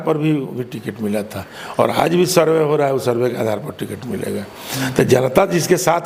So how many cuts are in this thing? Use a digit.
0